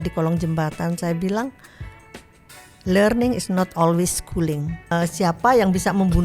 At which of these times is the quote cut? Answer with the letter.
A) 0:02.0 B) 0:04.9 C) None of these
B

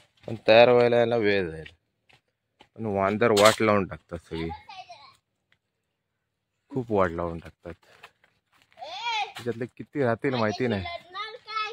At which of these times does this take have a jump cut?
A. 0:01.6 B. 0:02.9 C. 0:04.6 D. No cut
D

